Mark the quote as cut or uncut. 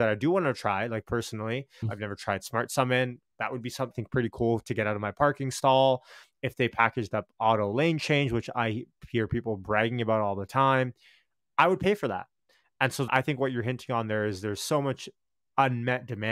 cut